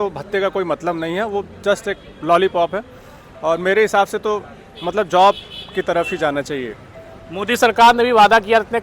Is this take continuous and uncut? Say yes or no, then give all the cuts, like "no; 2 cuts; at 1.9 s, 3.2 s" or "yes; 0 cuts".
yes; 0 cuts